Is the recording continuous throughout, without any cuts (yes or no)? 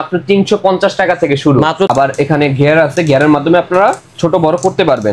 no